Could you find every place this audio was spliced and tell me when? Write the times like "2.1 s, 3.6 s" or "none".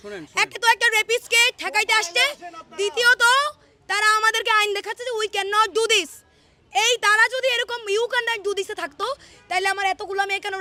none